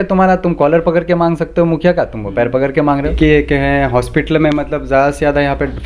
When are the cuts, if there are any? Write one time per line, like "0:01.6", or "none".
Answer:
0:03.1